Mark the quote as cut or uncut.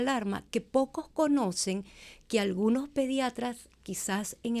uncut